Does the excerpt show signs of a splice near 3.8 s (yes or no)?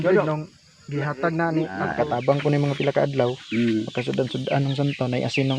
no